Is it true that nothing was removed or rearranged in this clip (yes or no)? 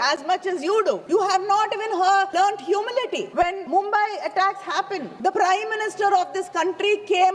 no